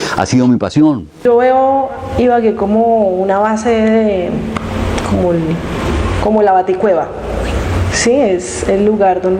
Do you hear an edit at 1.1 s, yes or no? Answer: yes